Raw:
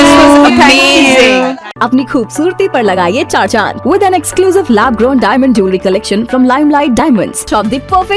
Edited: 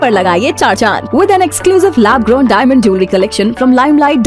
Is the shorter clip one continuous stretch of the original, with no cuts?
yes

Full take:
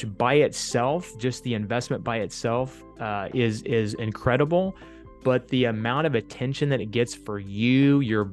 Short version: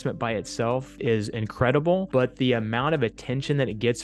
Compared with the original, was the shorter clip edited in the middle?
yes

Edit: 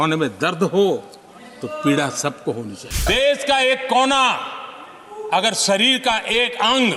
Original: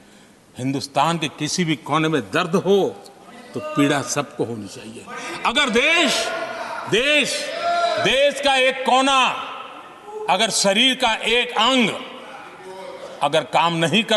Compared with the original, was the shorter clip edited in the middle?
yes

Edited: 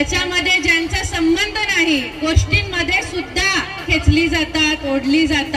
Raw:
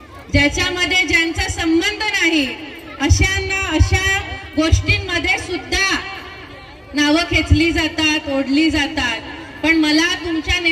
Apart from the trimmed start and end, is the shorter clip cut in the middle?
yes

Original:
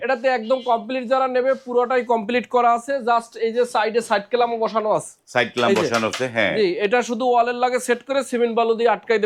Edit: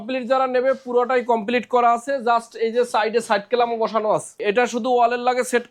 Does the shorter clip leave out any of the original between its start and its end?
yes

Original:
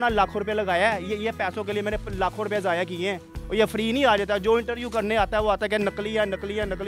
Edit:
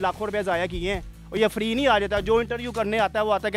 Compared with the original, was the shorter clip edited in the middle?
no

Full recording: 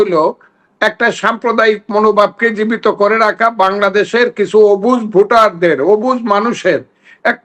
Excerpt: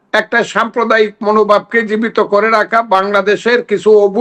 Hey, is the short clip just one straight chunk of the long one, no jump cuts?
yes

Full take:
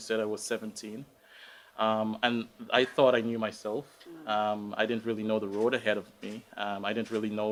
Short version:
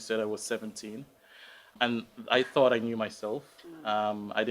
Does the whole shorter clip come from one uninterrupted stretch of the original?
no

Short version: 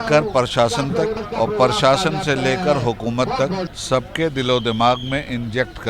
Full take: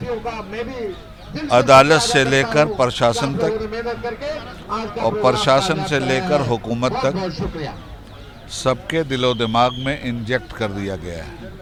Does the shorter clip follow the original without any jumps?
no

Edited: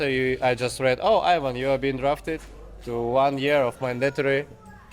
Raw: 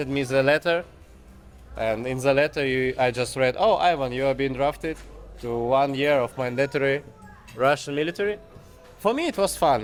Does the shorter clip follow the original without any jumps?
yes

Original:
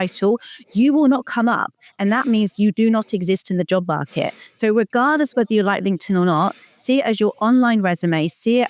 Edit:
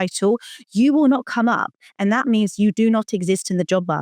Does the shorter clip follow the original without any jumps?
yes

